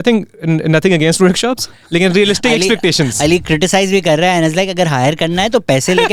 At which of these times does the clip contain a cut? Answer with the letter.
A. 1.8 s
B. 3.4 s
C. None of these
C